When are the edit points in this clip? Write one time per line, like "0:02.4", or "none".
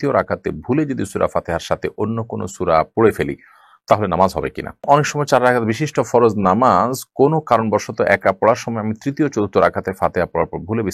0:04.8